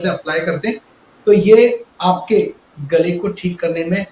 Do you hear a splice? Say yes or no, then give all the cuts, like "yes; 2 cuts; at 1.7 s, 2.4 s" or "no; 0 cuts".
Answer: yes; 1 cut; at 1.9 s